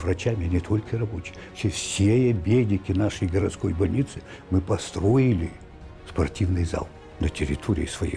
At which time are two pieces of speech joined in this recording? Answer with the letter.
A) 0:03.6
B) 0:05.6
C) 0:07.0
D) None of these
C